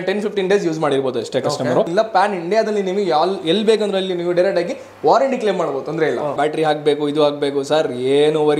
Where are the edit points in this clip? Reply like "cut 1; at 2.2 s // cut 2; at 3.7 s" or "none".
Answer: cut 1; at 1.9 s // cut 2; at 6.4 s